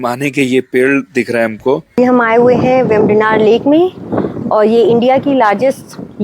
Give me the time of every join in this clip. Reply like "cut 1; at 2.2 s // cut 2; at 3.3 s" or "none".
cut 1; at 2.0 s